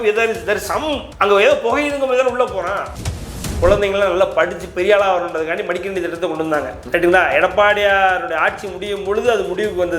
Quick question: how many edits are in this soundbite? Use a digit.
1